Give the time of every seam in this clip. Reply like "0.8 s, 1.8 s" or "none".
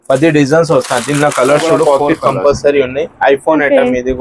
1.8 s